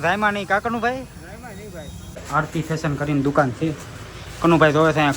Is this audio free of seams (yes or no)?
no